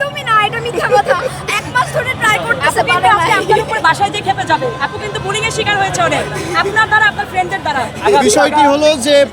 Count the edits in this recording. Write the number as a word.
zero